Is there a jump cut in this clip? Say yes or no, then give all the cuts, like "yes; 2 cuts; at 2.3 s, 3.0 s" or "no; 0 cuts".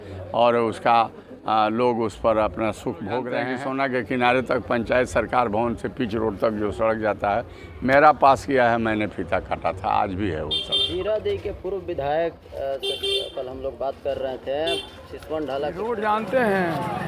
yes; 2 cuts; at 3.4 s, 15.8 s